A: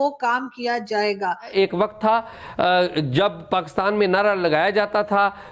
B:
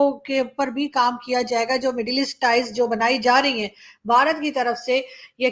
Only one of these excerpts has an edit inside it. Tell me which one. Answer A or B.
A